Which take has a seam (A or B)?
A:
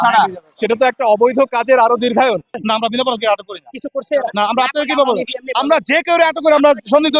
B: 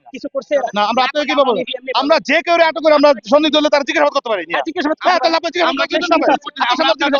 A